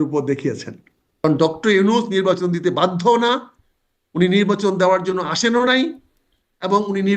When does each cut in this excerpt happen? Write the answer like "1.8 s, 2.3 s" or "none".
1.2 s